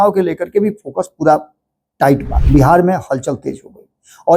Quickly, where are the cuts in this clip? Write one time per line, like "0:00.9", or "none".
0:02.3